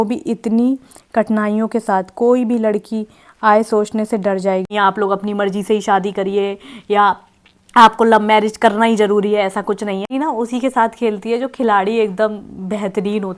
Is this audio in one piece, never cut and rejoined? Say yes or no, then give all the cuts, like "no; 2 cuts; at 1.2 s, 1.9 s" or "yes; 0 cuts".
no; 2 cuts; at 4.7 s, 10.1 s